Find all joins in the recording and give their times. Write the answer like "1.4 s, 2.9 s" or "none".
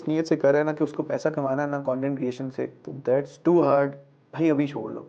2.8 s

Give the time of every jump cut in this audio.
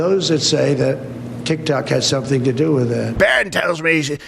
3.2 s

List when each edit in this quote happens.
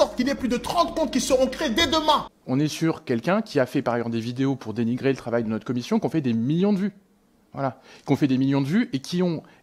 2.3 s

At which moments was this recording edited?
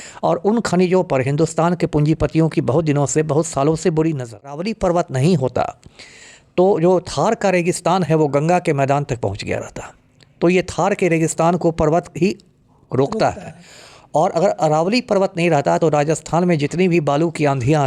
4.7 s

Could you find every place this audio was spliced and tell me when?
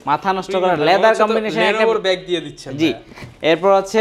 none

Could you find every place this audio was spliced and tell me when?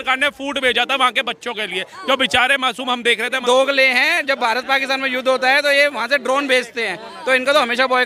3.4 s

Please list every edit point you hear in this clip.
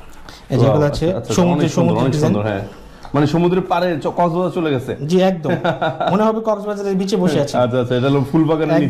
none

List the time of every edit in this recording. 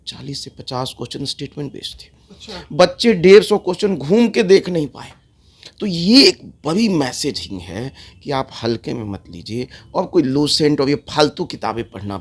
none

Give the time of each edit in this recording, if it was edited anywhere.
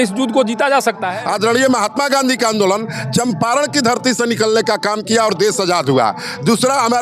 1.1 s

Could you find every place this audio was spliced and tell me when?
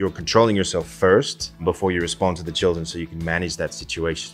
1.6 s

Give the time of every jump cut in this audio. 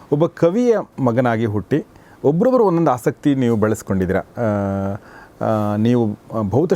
0.9 s

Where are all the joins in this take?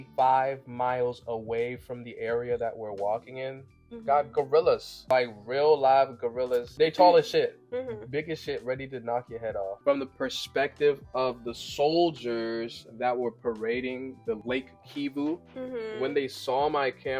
4.9 s, 6.7 s, 9.8 s

